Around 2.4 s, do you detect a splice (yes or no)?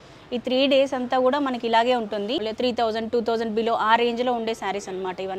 yes